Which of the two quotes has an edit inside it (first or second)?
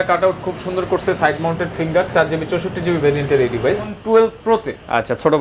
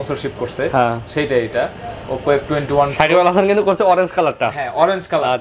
first